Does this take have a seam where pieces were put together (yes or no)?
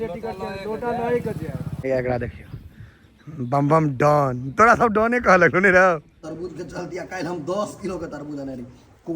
yes